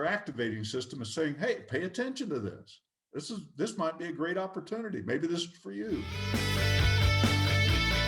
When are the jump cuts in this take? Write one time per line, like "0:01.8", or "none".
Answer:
0:06.1